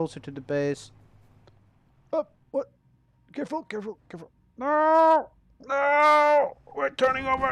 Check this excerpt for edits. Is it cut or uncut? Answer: uncut